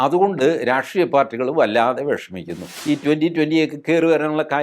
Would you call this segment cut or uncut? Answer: cut